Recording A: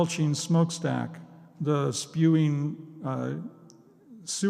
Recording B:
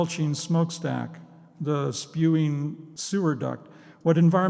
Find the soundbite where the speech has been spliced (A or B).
B